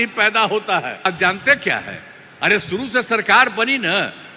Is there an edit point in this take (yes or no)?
yes